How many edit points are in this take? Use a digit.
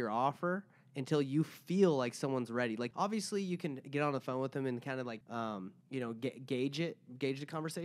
2